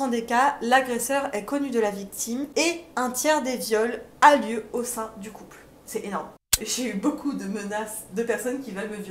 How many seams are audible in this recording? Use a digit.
2